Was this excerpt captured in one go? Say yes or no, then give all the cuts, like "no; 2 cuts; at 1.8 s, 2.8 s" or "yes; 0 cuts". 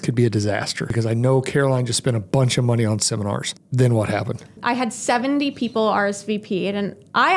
no; 3 cuts; at 0.9 s, 3.5 s, 4.6 s